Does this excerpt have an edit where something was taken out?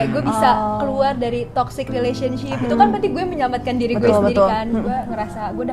no; 0 cuts

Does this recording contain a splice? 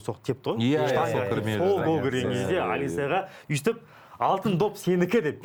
no; 0 cuts

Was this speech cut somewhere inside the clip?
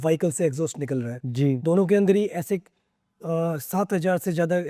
no; 0 cuts

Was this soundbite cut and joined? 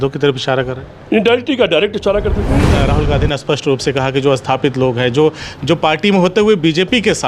yes; 1 cut; at 2.7 s

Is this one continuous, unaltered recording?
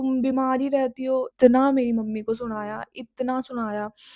no; 1 cut; at 1.3 s

